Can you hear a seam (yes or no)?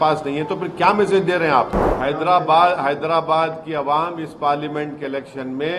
yes